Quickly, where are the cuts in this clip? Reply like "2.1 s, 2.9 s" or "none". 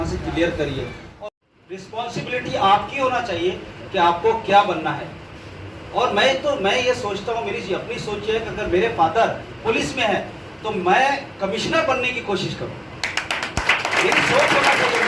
1.1 s

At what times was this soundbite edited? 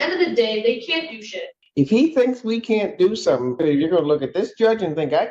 1.6 s, 3.6 s

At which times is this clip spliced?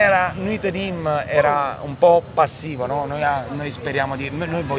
none

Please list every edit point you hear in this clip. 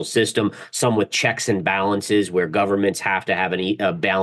none

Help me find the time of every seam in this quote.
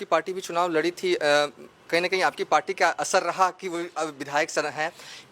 none

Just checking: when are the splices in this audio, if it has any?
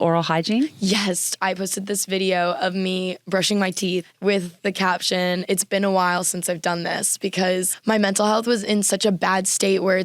1.3 s, 4.1 s, 7.7 s

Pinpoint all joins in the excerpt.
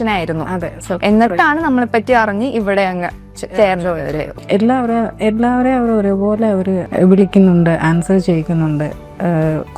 4.3 s, 6.9 s

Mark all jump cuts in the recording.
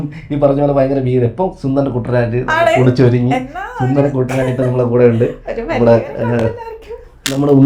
none

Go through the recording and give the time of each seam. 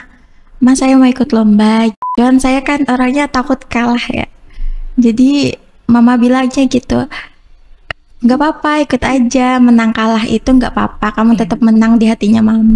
2.0 s

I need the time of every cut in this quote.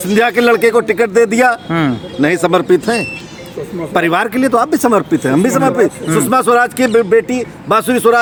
none

